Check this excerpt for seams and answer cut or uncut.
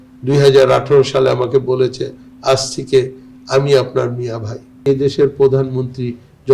cut